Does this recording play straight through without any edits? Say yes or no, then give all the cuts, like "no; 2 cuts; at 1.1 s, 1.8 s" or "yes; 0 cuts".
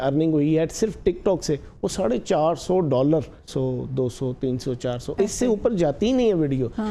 no; 1 cut; at 3.4 s